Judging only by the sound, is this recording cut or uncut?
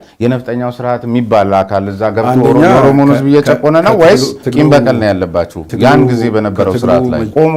uncut